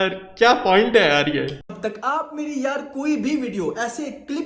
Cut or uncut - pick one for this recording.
uncut